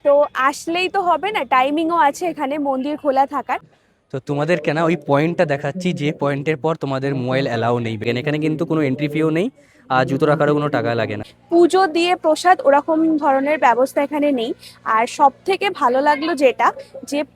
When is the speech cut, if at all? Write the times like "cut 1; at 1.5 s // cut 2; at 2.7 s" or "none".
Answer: cut 1; at 3.7 s // cut 2; at 8.1 s // cut 3; at 11.2 s